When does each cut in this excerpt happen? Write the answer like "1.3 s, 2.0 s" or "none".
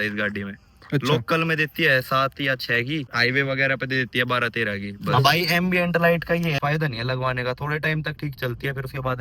3.1 s, 4.9 s, 6.6 s